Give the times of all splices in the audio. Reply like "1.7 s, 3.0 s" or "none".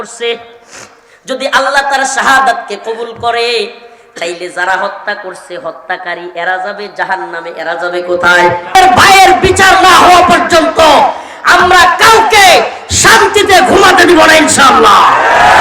8.7 s

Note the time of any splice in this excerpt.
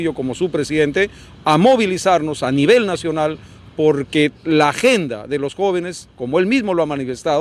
none

